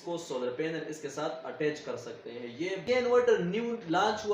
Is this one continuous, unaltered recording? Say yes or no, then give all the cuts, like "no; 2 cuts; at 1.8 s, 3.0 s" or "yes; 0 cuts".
no; 1 cut; at 2.9 s